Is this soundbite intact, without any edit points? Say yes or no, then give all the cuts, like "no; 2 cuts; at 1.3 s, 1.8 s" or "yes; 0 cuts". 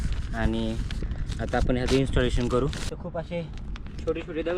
no; 1 cut; at 2.9 s